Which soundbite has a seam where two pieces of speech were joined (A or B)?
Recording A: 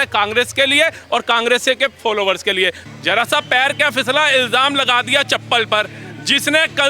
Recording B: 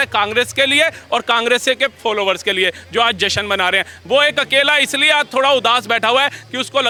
A